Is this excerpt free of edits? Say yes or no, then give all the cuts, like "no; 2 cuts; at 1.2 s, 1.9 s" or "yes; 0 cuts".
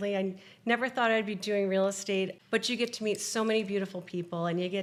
yes; 0 cuts